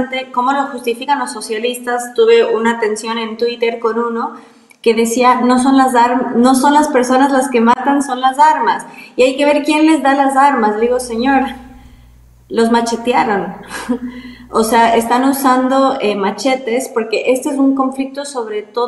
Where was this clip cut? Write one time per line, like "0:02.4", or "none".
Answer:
none